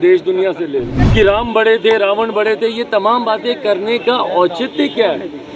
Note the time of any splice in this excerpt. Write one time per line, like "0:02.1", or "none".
0:01.0